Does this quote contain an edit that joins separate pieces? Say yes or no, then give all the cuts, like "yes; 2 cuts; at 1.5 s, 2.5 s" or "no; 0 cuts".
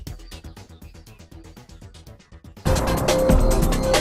yes; 1 cut; at 2.2 s